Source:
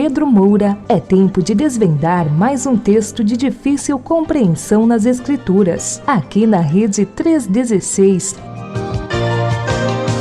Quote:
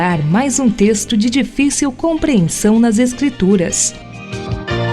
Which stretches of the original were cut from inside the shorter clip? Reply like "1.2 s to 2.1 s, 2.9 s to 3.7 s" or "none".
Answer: 5.9 s to 8.3 s